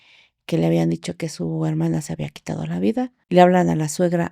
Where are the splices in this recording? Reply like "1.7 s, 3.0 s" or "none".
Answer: 3.2 s